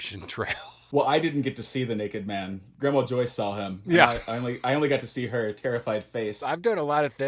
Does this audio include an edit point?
yes; 2 cuts; at 2.6 s, 6.4 s

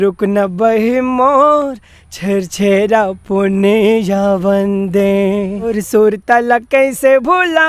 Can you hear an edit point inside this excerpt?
yes; 1 cut; at 5.8 s

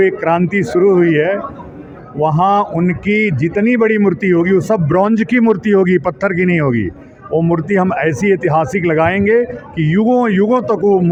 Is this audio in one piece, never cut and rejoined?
yes; 0 cuts

